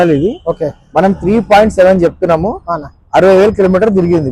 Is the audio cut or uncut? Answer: uncut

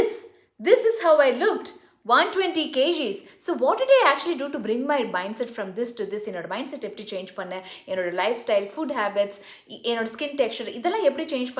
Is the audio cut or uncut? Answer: uncut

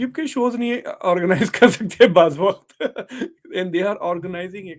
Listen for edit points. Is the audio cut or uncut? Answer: uncut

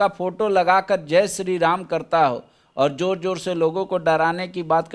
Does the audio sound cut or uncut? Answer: uncut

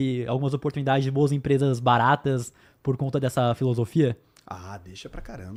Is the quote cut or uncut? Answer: uncut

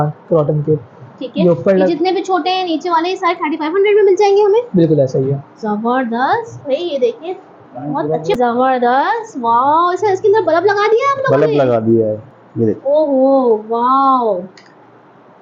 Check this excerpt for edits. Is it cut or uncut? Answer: cut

